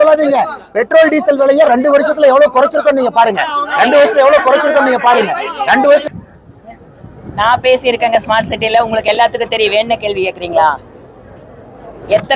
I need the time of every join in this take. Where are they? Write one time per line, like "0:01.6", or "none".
0:06.0